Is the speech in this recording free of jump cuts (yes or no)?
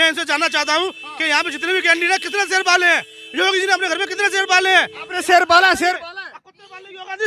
yes